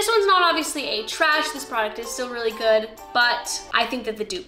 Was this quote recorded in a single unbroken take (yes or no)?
yes